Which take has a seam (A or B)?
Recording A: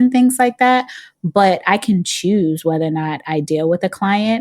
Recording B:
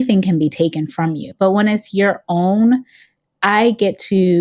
B